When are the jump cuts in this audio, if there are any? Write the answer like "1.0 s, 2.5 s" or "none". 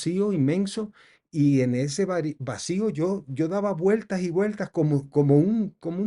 none